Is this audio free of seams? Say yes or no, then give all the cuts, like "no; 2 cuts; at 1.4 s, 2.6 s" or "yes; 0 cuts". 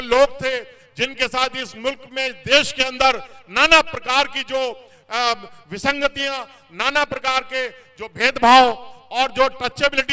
yes; 0 cuts